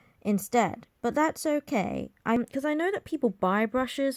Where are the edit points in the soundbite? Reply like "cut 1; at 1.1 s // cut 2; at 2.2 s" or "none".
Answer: cut 1; at 2.4 s